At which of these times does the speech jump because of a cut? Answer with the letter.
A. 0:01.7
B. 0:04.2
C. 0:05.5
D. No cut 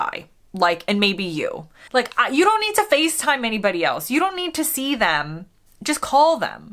A